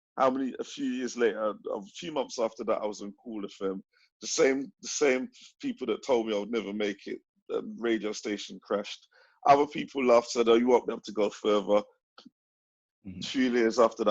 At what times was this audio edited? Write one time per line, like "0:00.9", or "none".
0:12.8